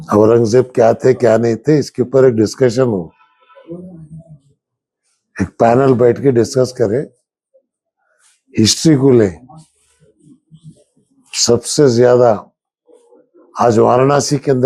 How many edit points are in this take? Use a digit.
0